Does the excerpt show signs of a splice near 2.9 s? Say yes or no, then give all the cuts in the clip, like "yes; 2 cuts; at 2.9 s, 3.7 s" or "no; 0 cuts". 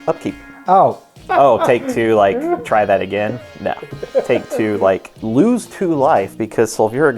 no; 2 cuts; at 1.2 s, 5.1 s